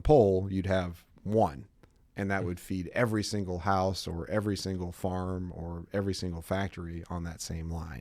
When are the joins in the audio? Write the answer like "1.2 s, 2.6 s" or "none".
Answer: none